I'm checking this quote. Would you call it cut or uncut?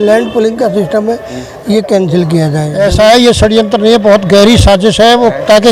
cut